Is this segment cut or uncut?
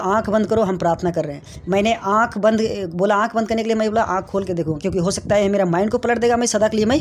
uncut